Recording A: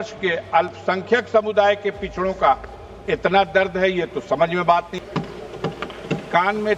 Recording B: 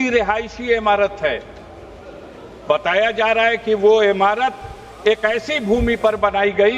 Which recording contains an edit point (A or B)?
A